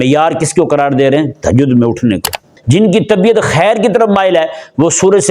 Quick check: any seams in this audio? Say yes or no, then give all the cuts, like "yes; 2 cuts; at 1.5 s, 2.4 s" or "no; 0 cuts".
yes; 1 cut; at 2.5 s